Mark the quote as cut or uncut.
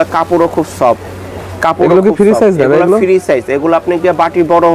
uncut